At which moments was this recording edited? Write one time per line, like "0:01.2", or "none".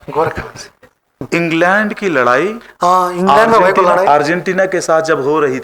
0:01.2